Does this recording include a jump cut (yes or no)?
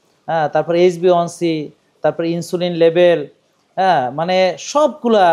no